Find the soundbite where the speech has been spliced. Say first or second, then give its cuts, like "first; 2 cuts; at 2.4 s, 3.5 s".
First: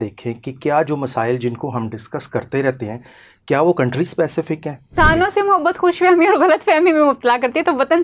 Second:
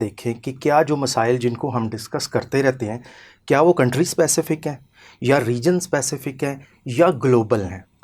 first; 1 cut; at 5.0 s